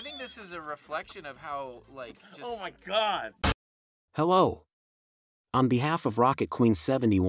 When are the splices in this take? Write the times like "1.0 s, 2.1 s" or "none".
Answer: 3.5 s